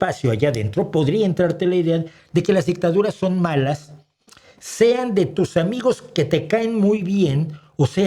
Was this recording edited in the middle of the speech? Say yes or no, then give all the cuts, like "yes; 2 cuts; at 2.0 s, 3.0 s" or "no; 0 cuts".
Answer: no; 0 cuts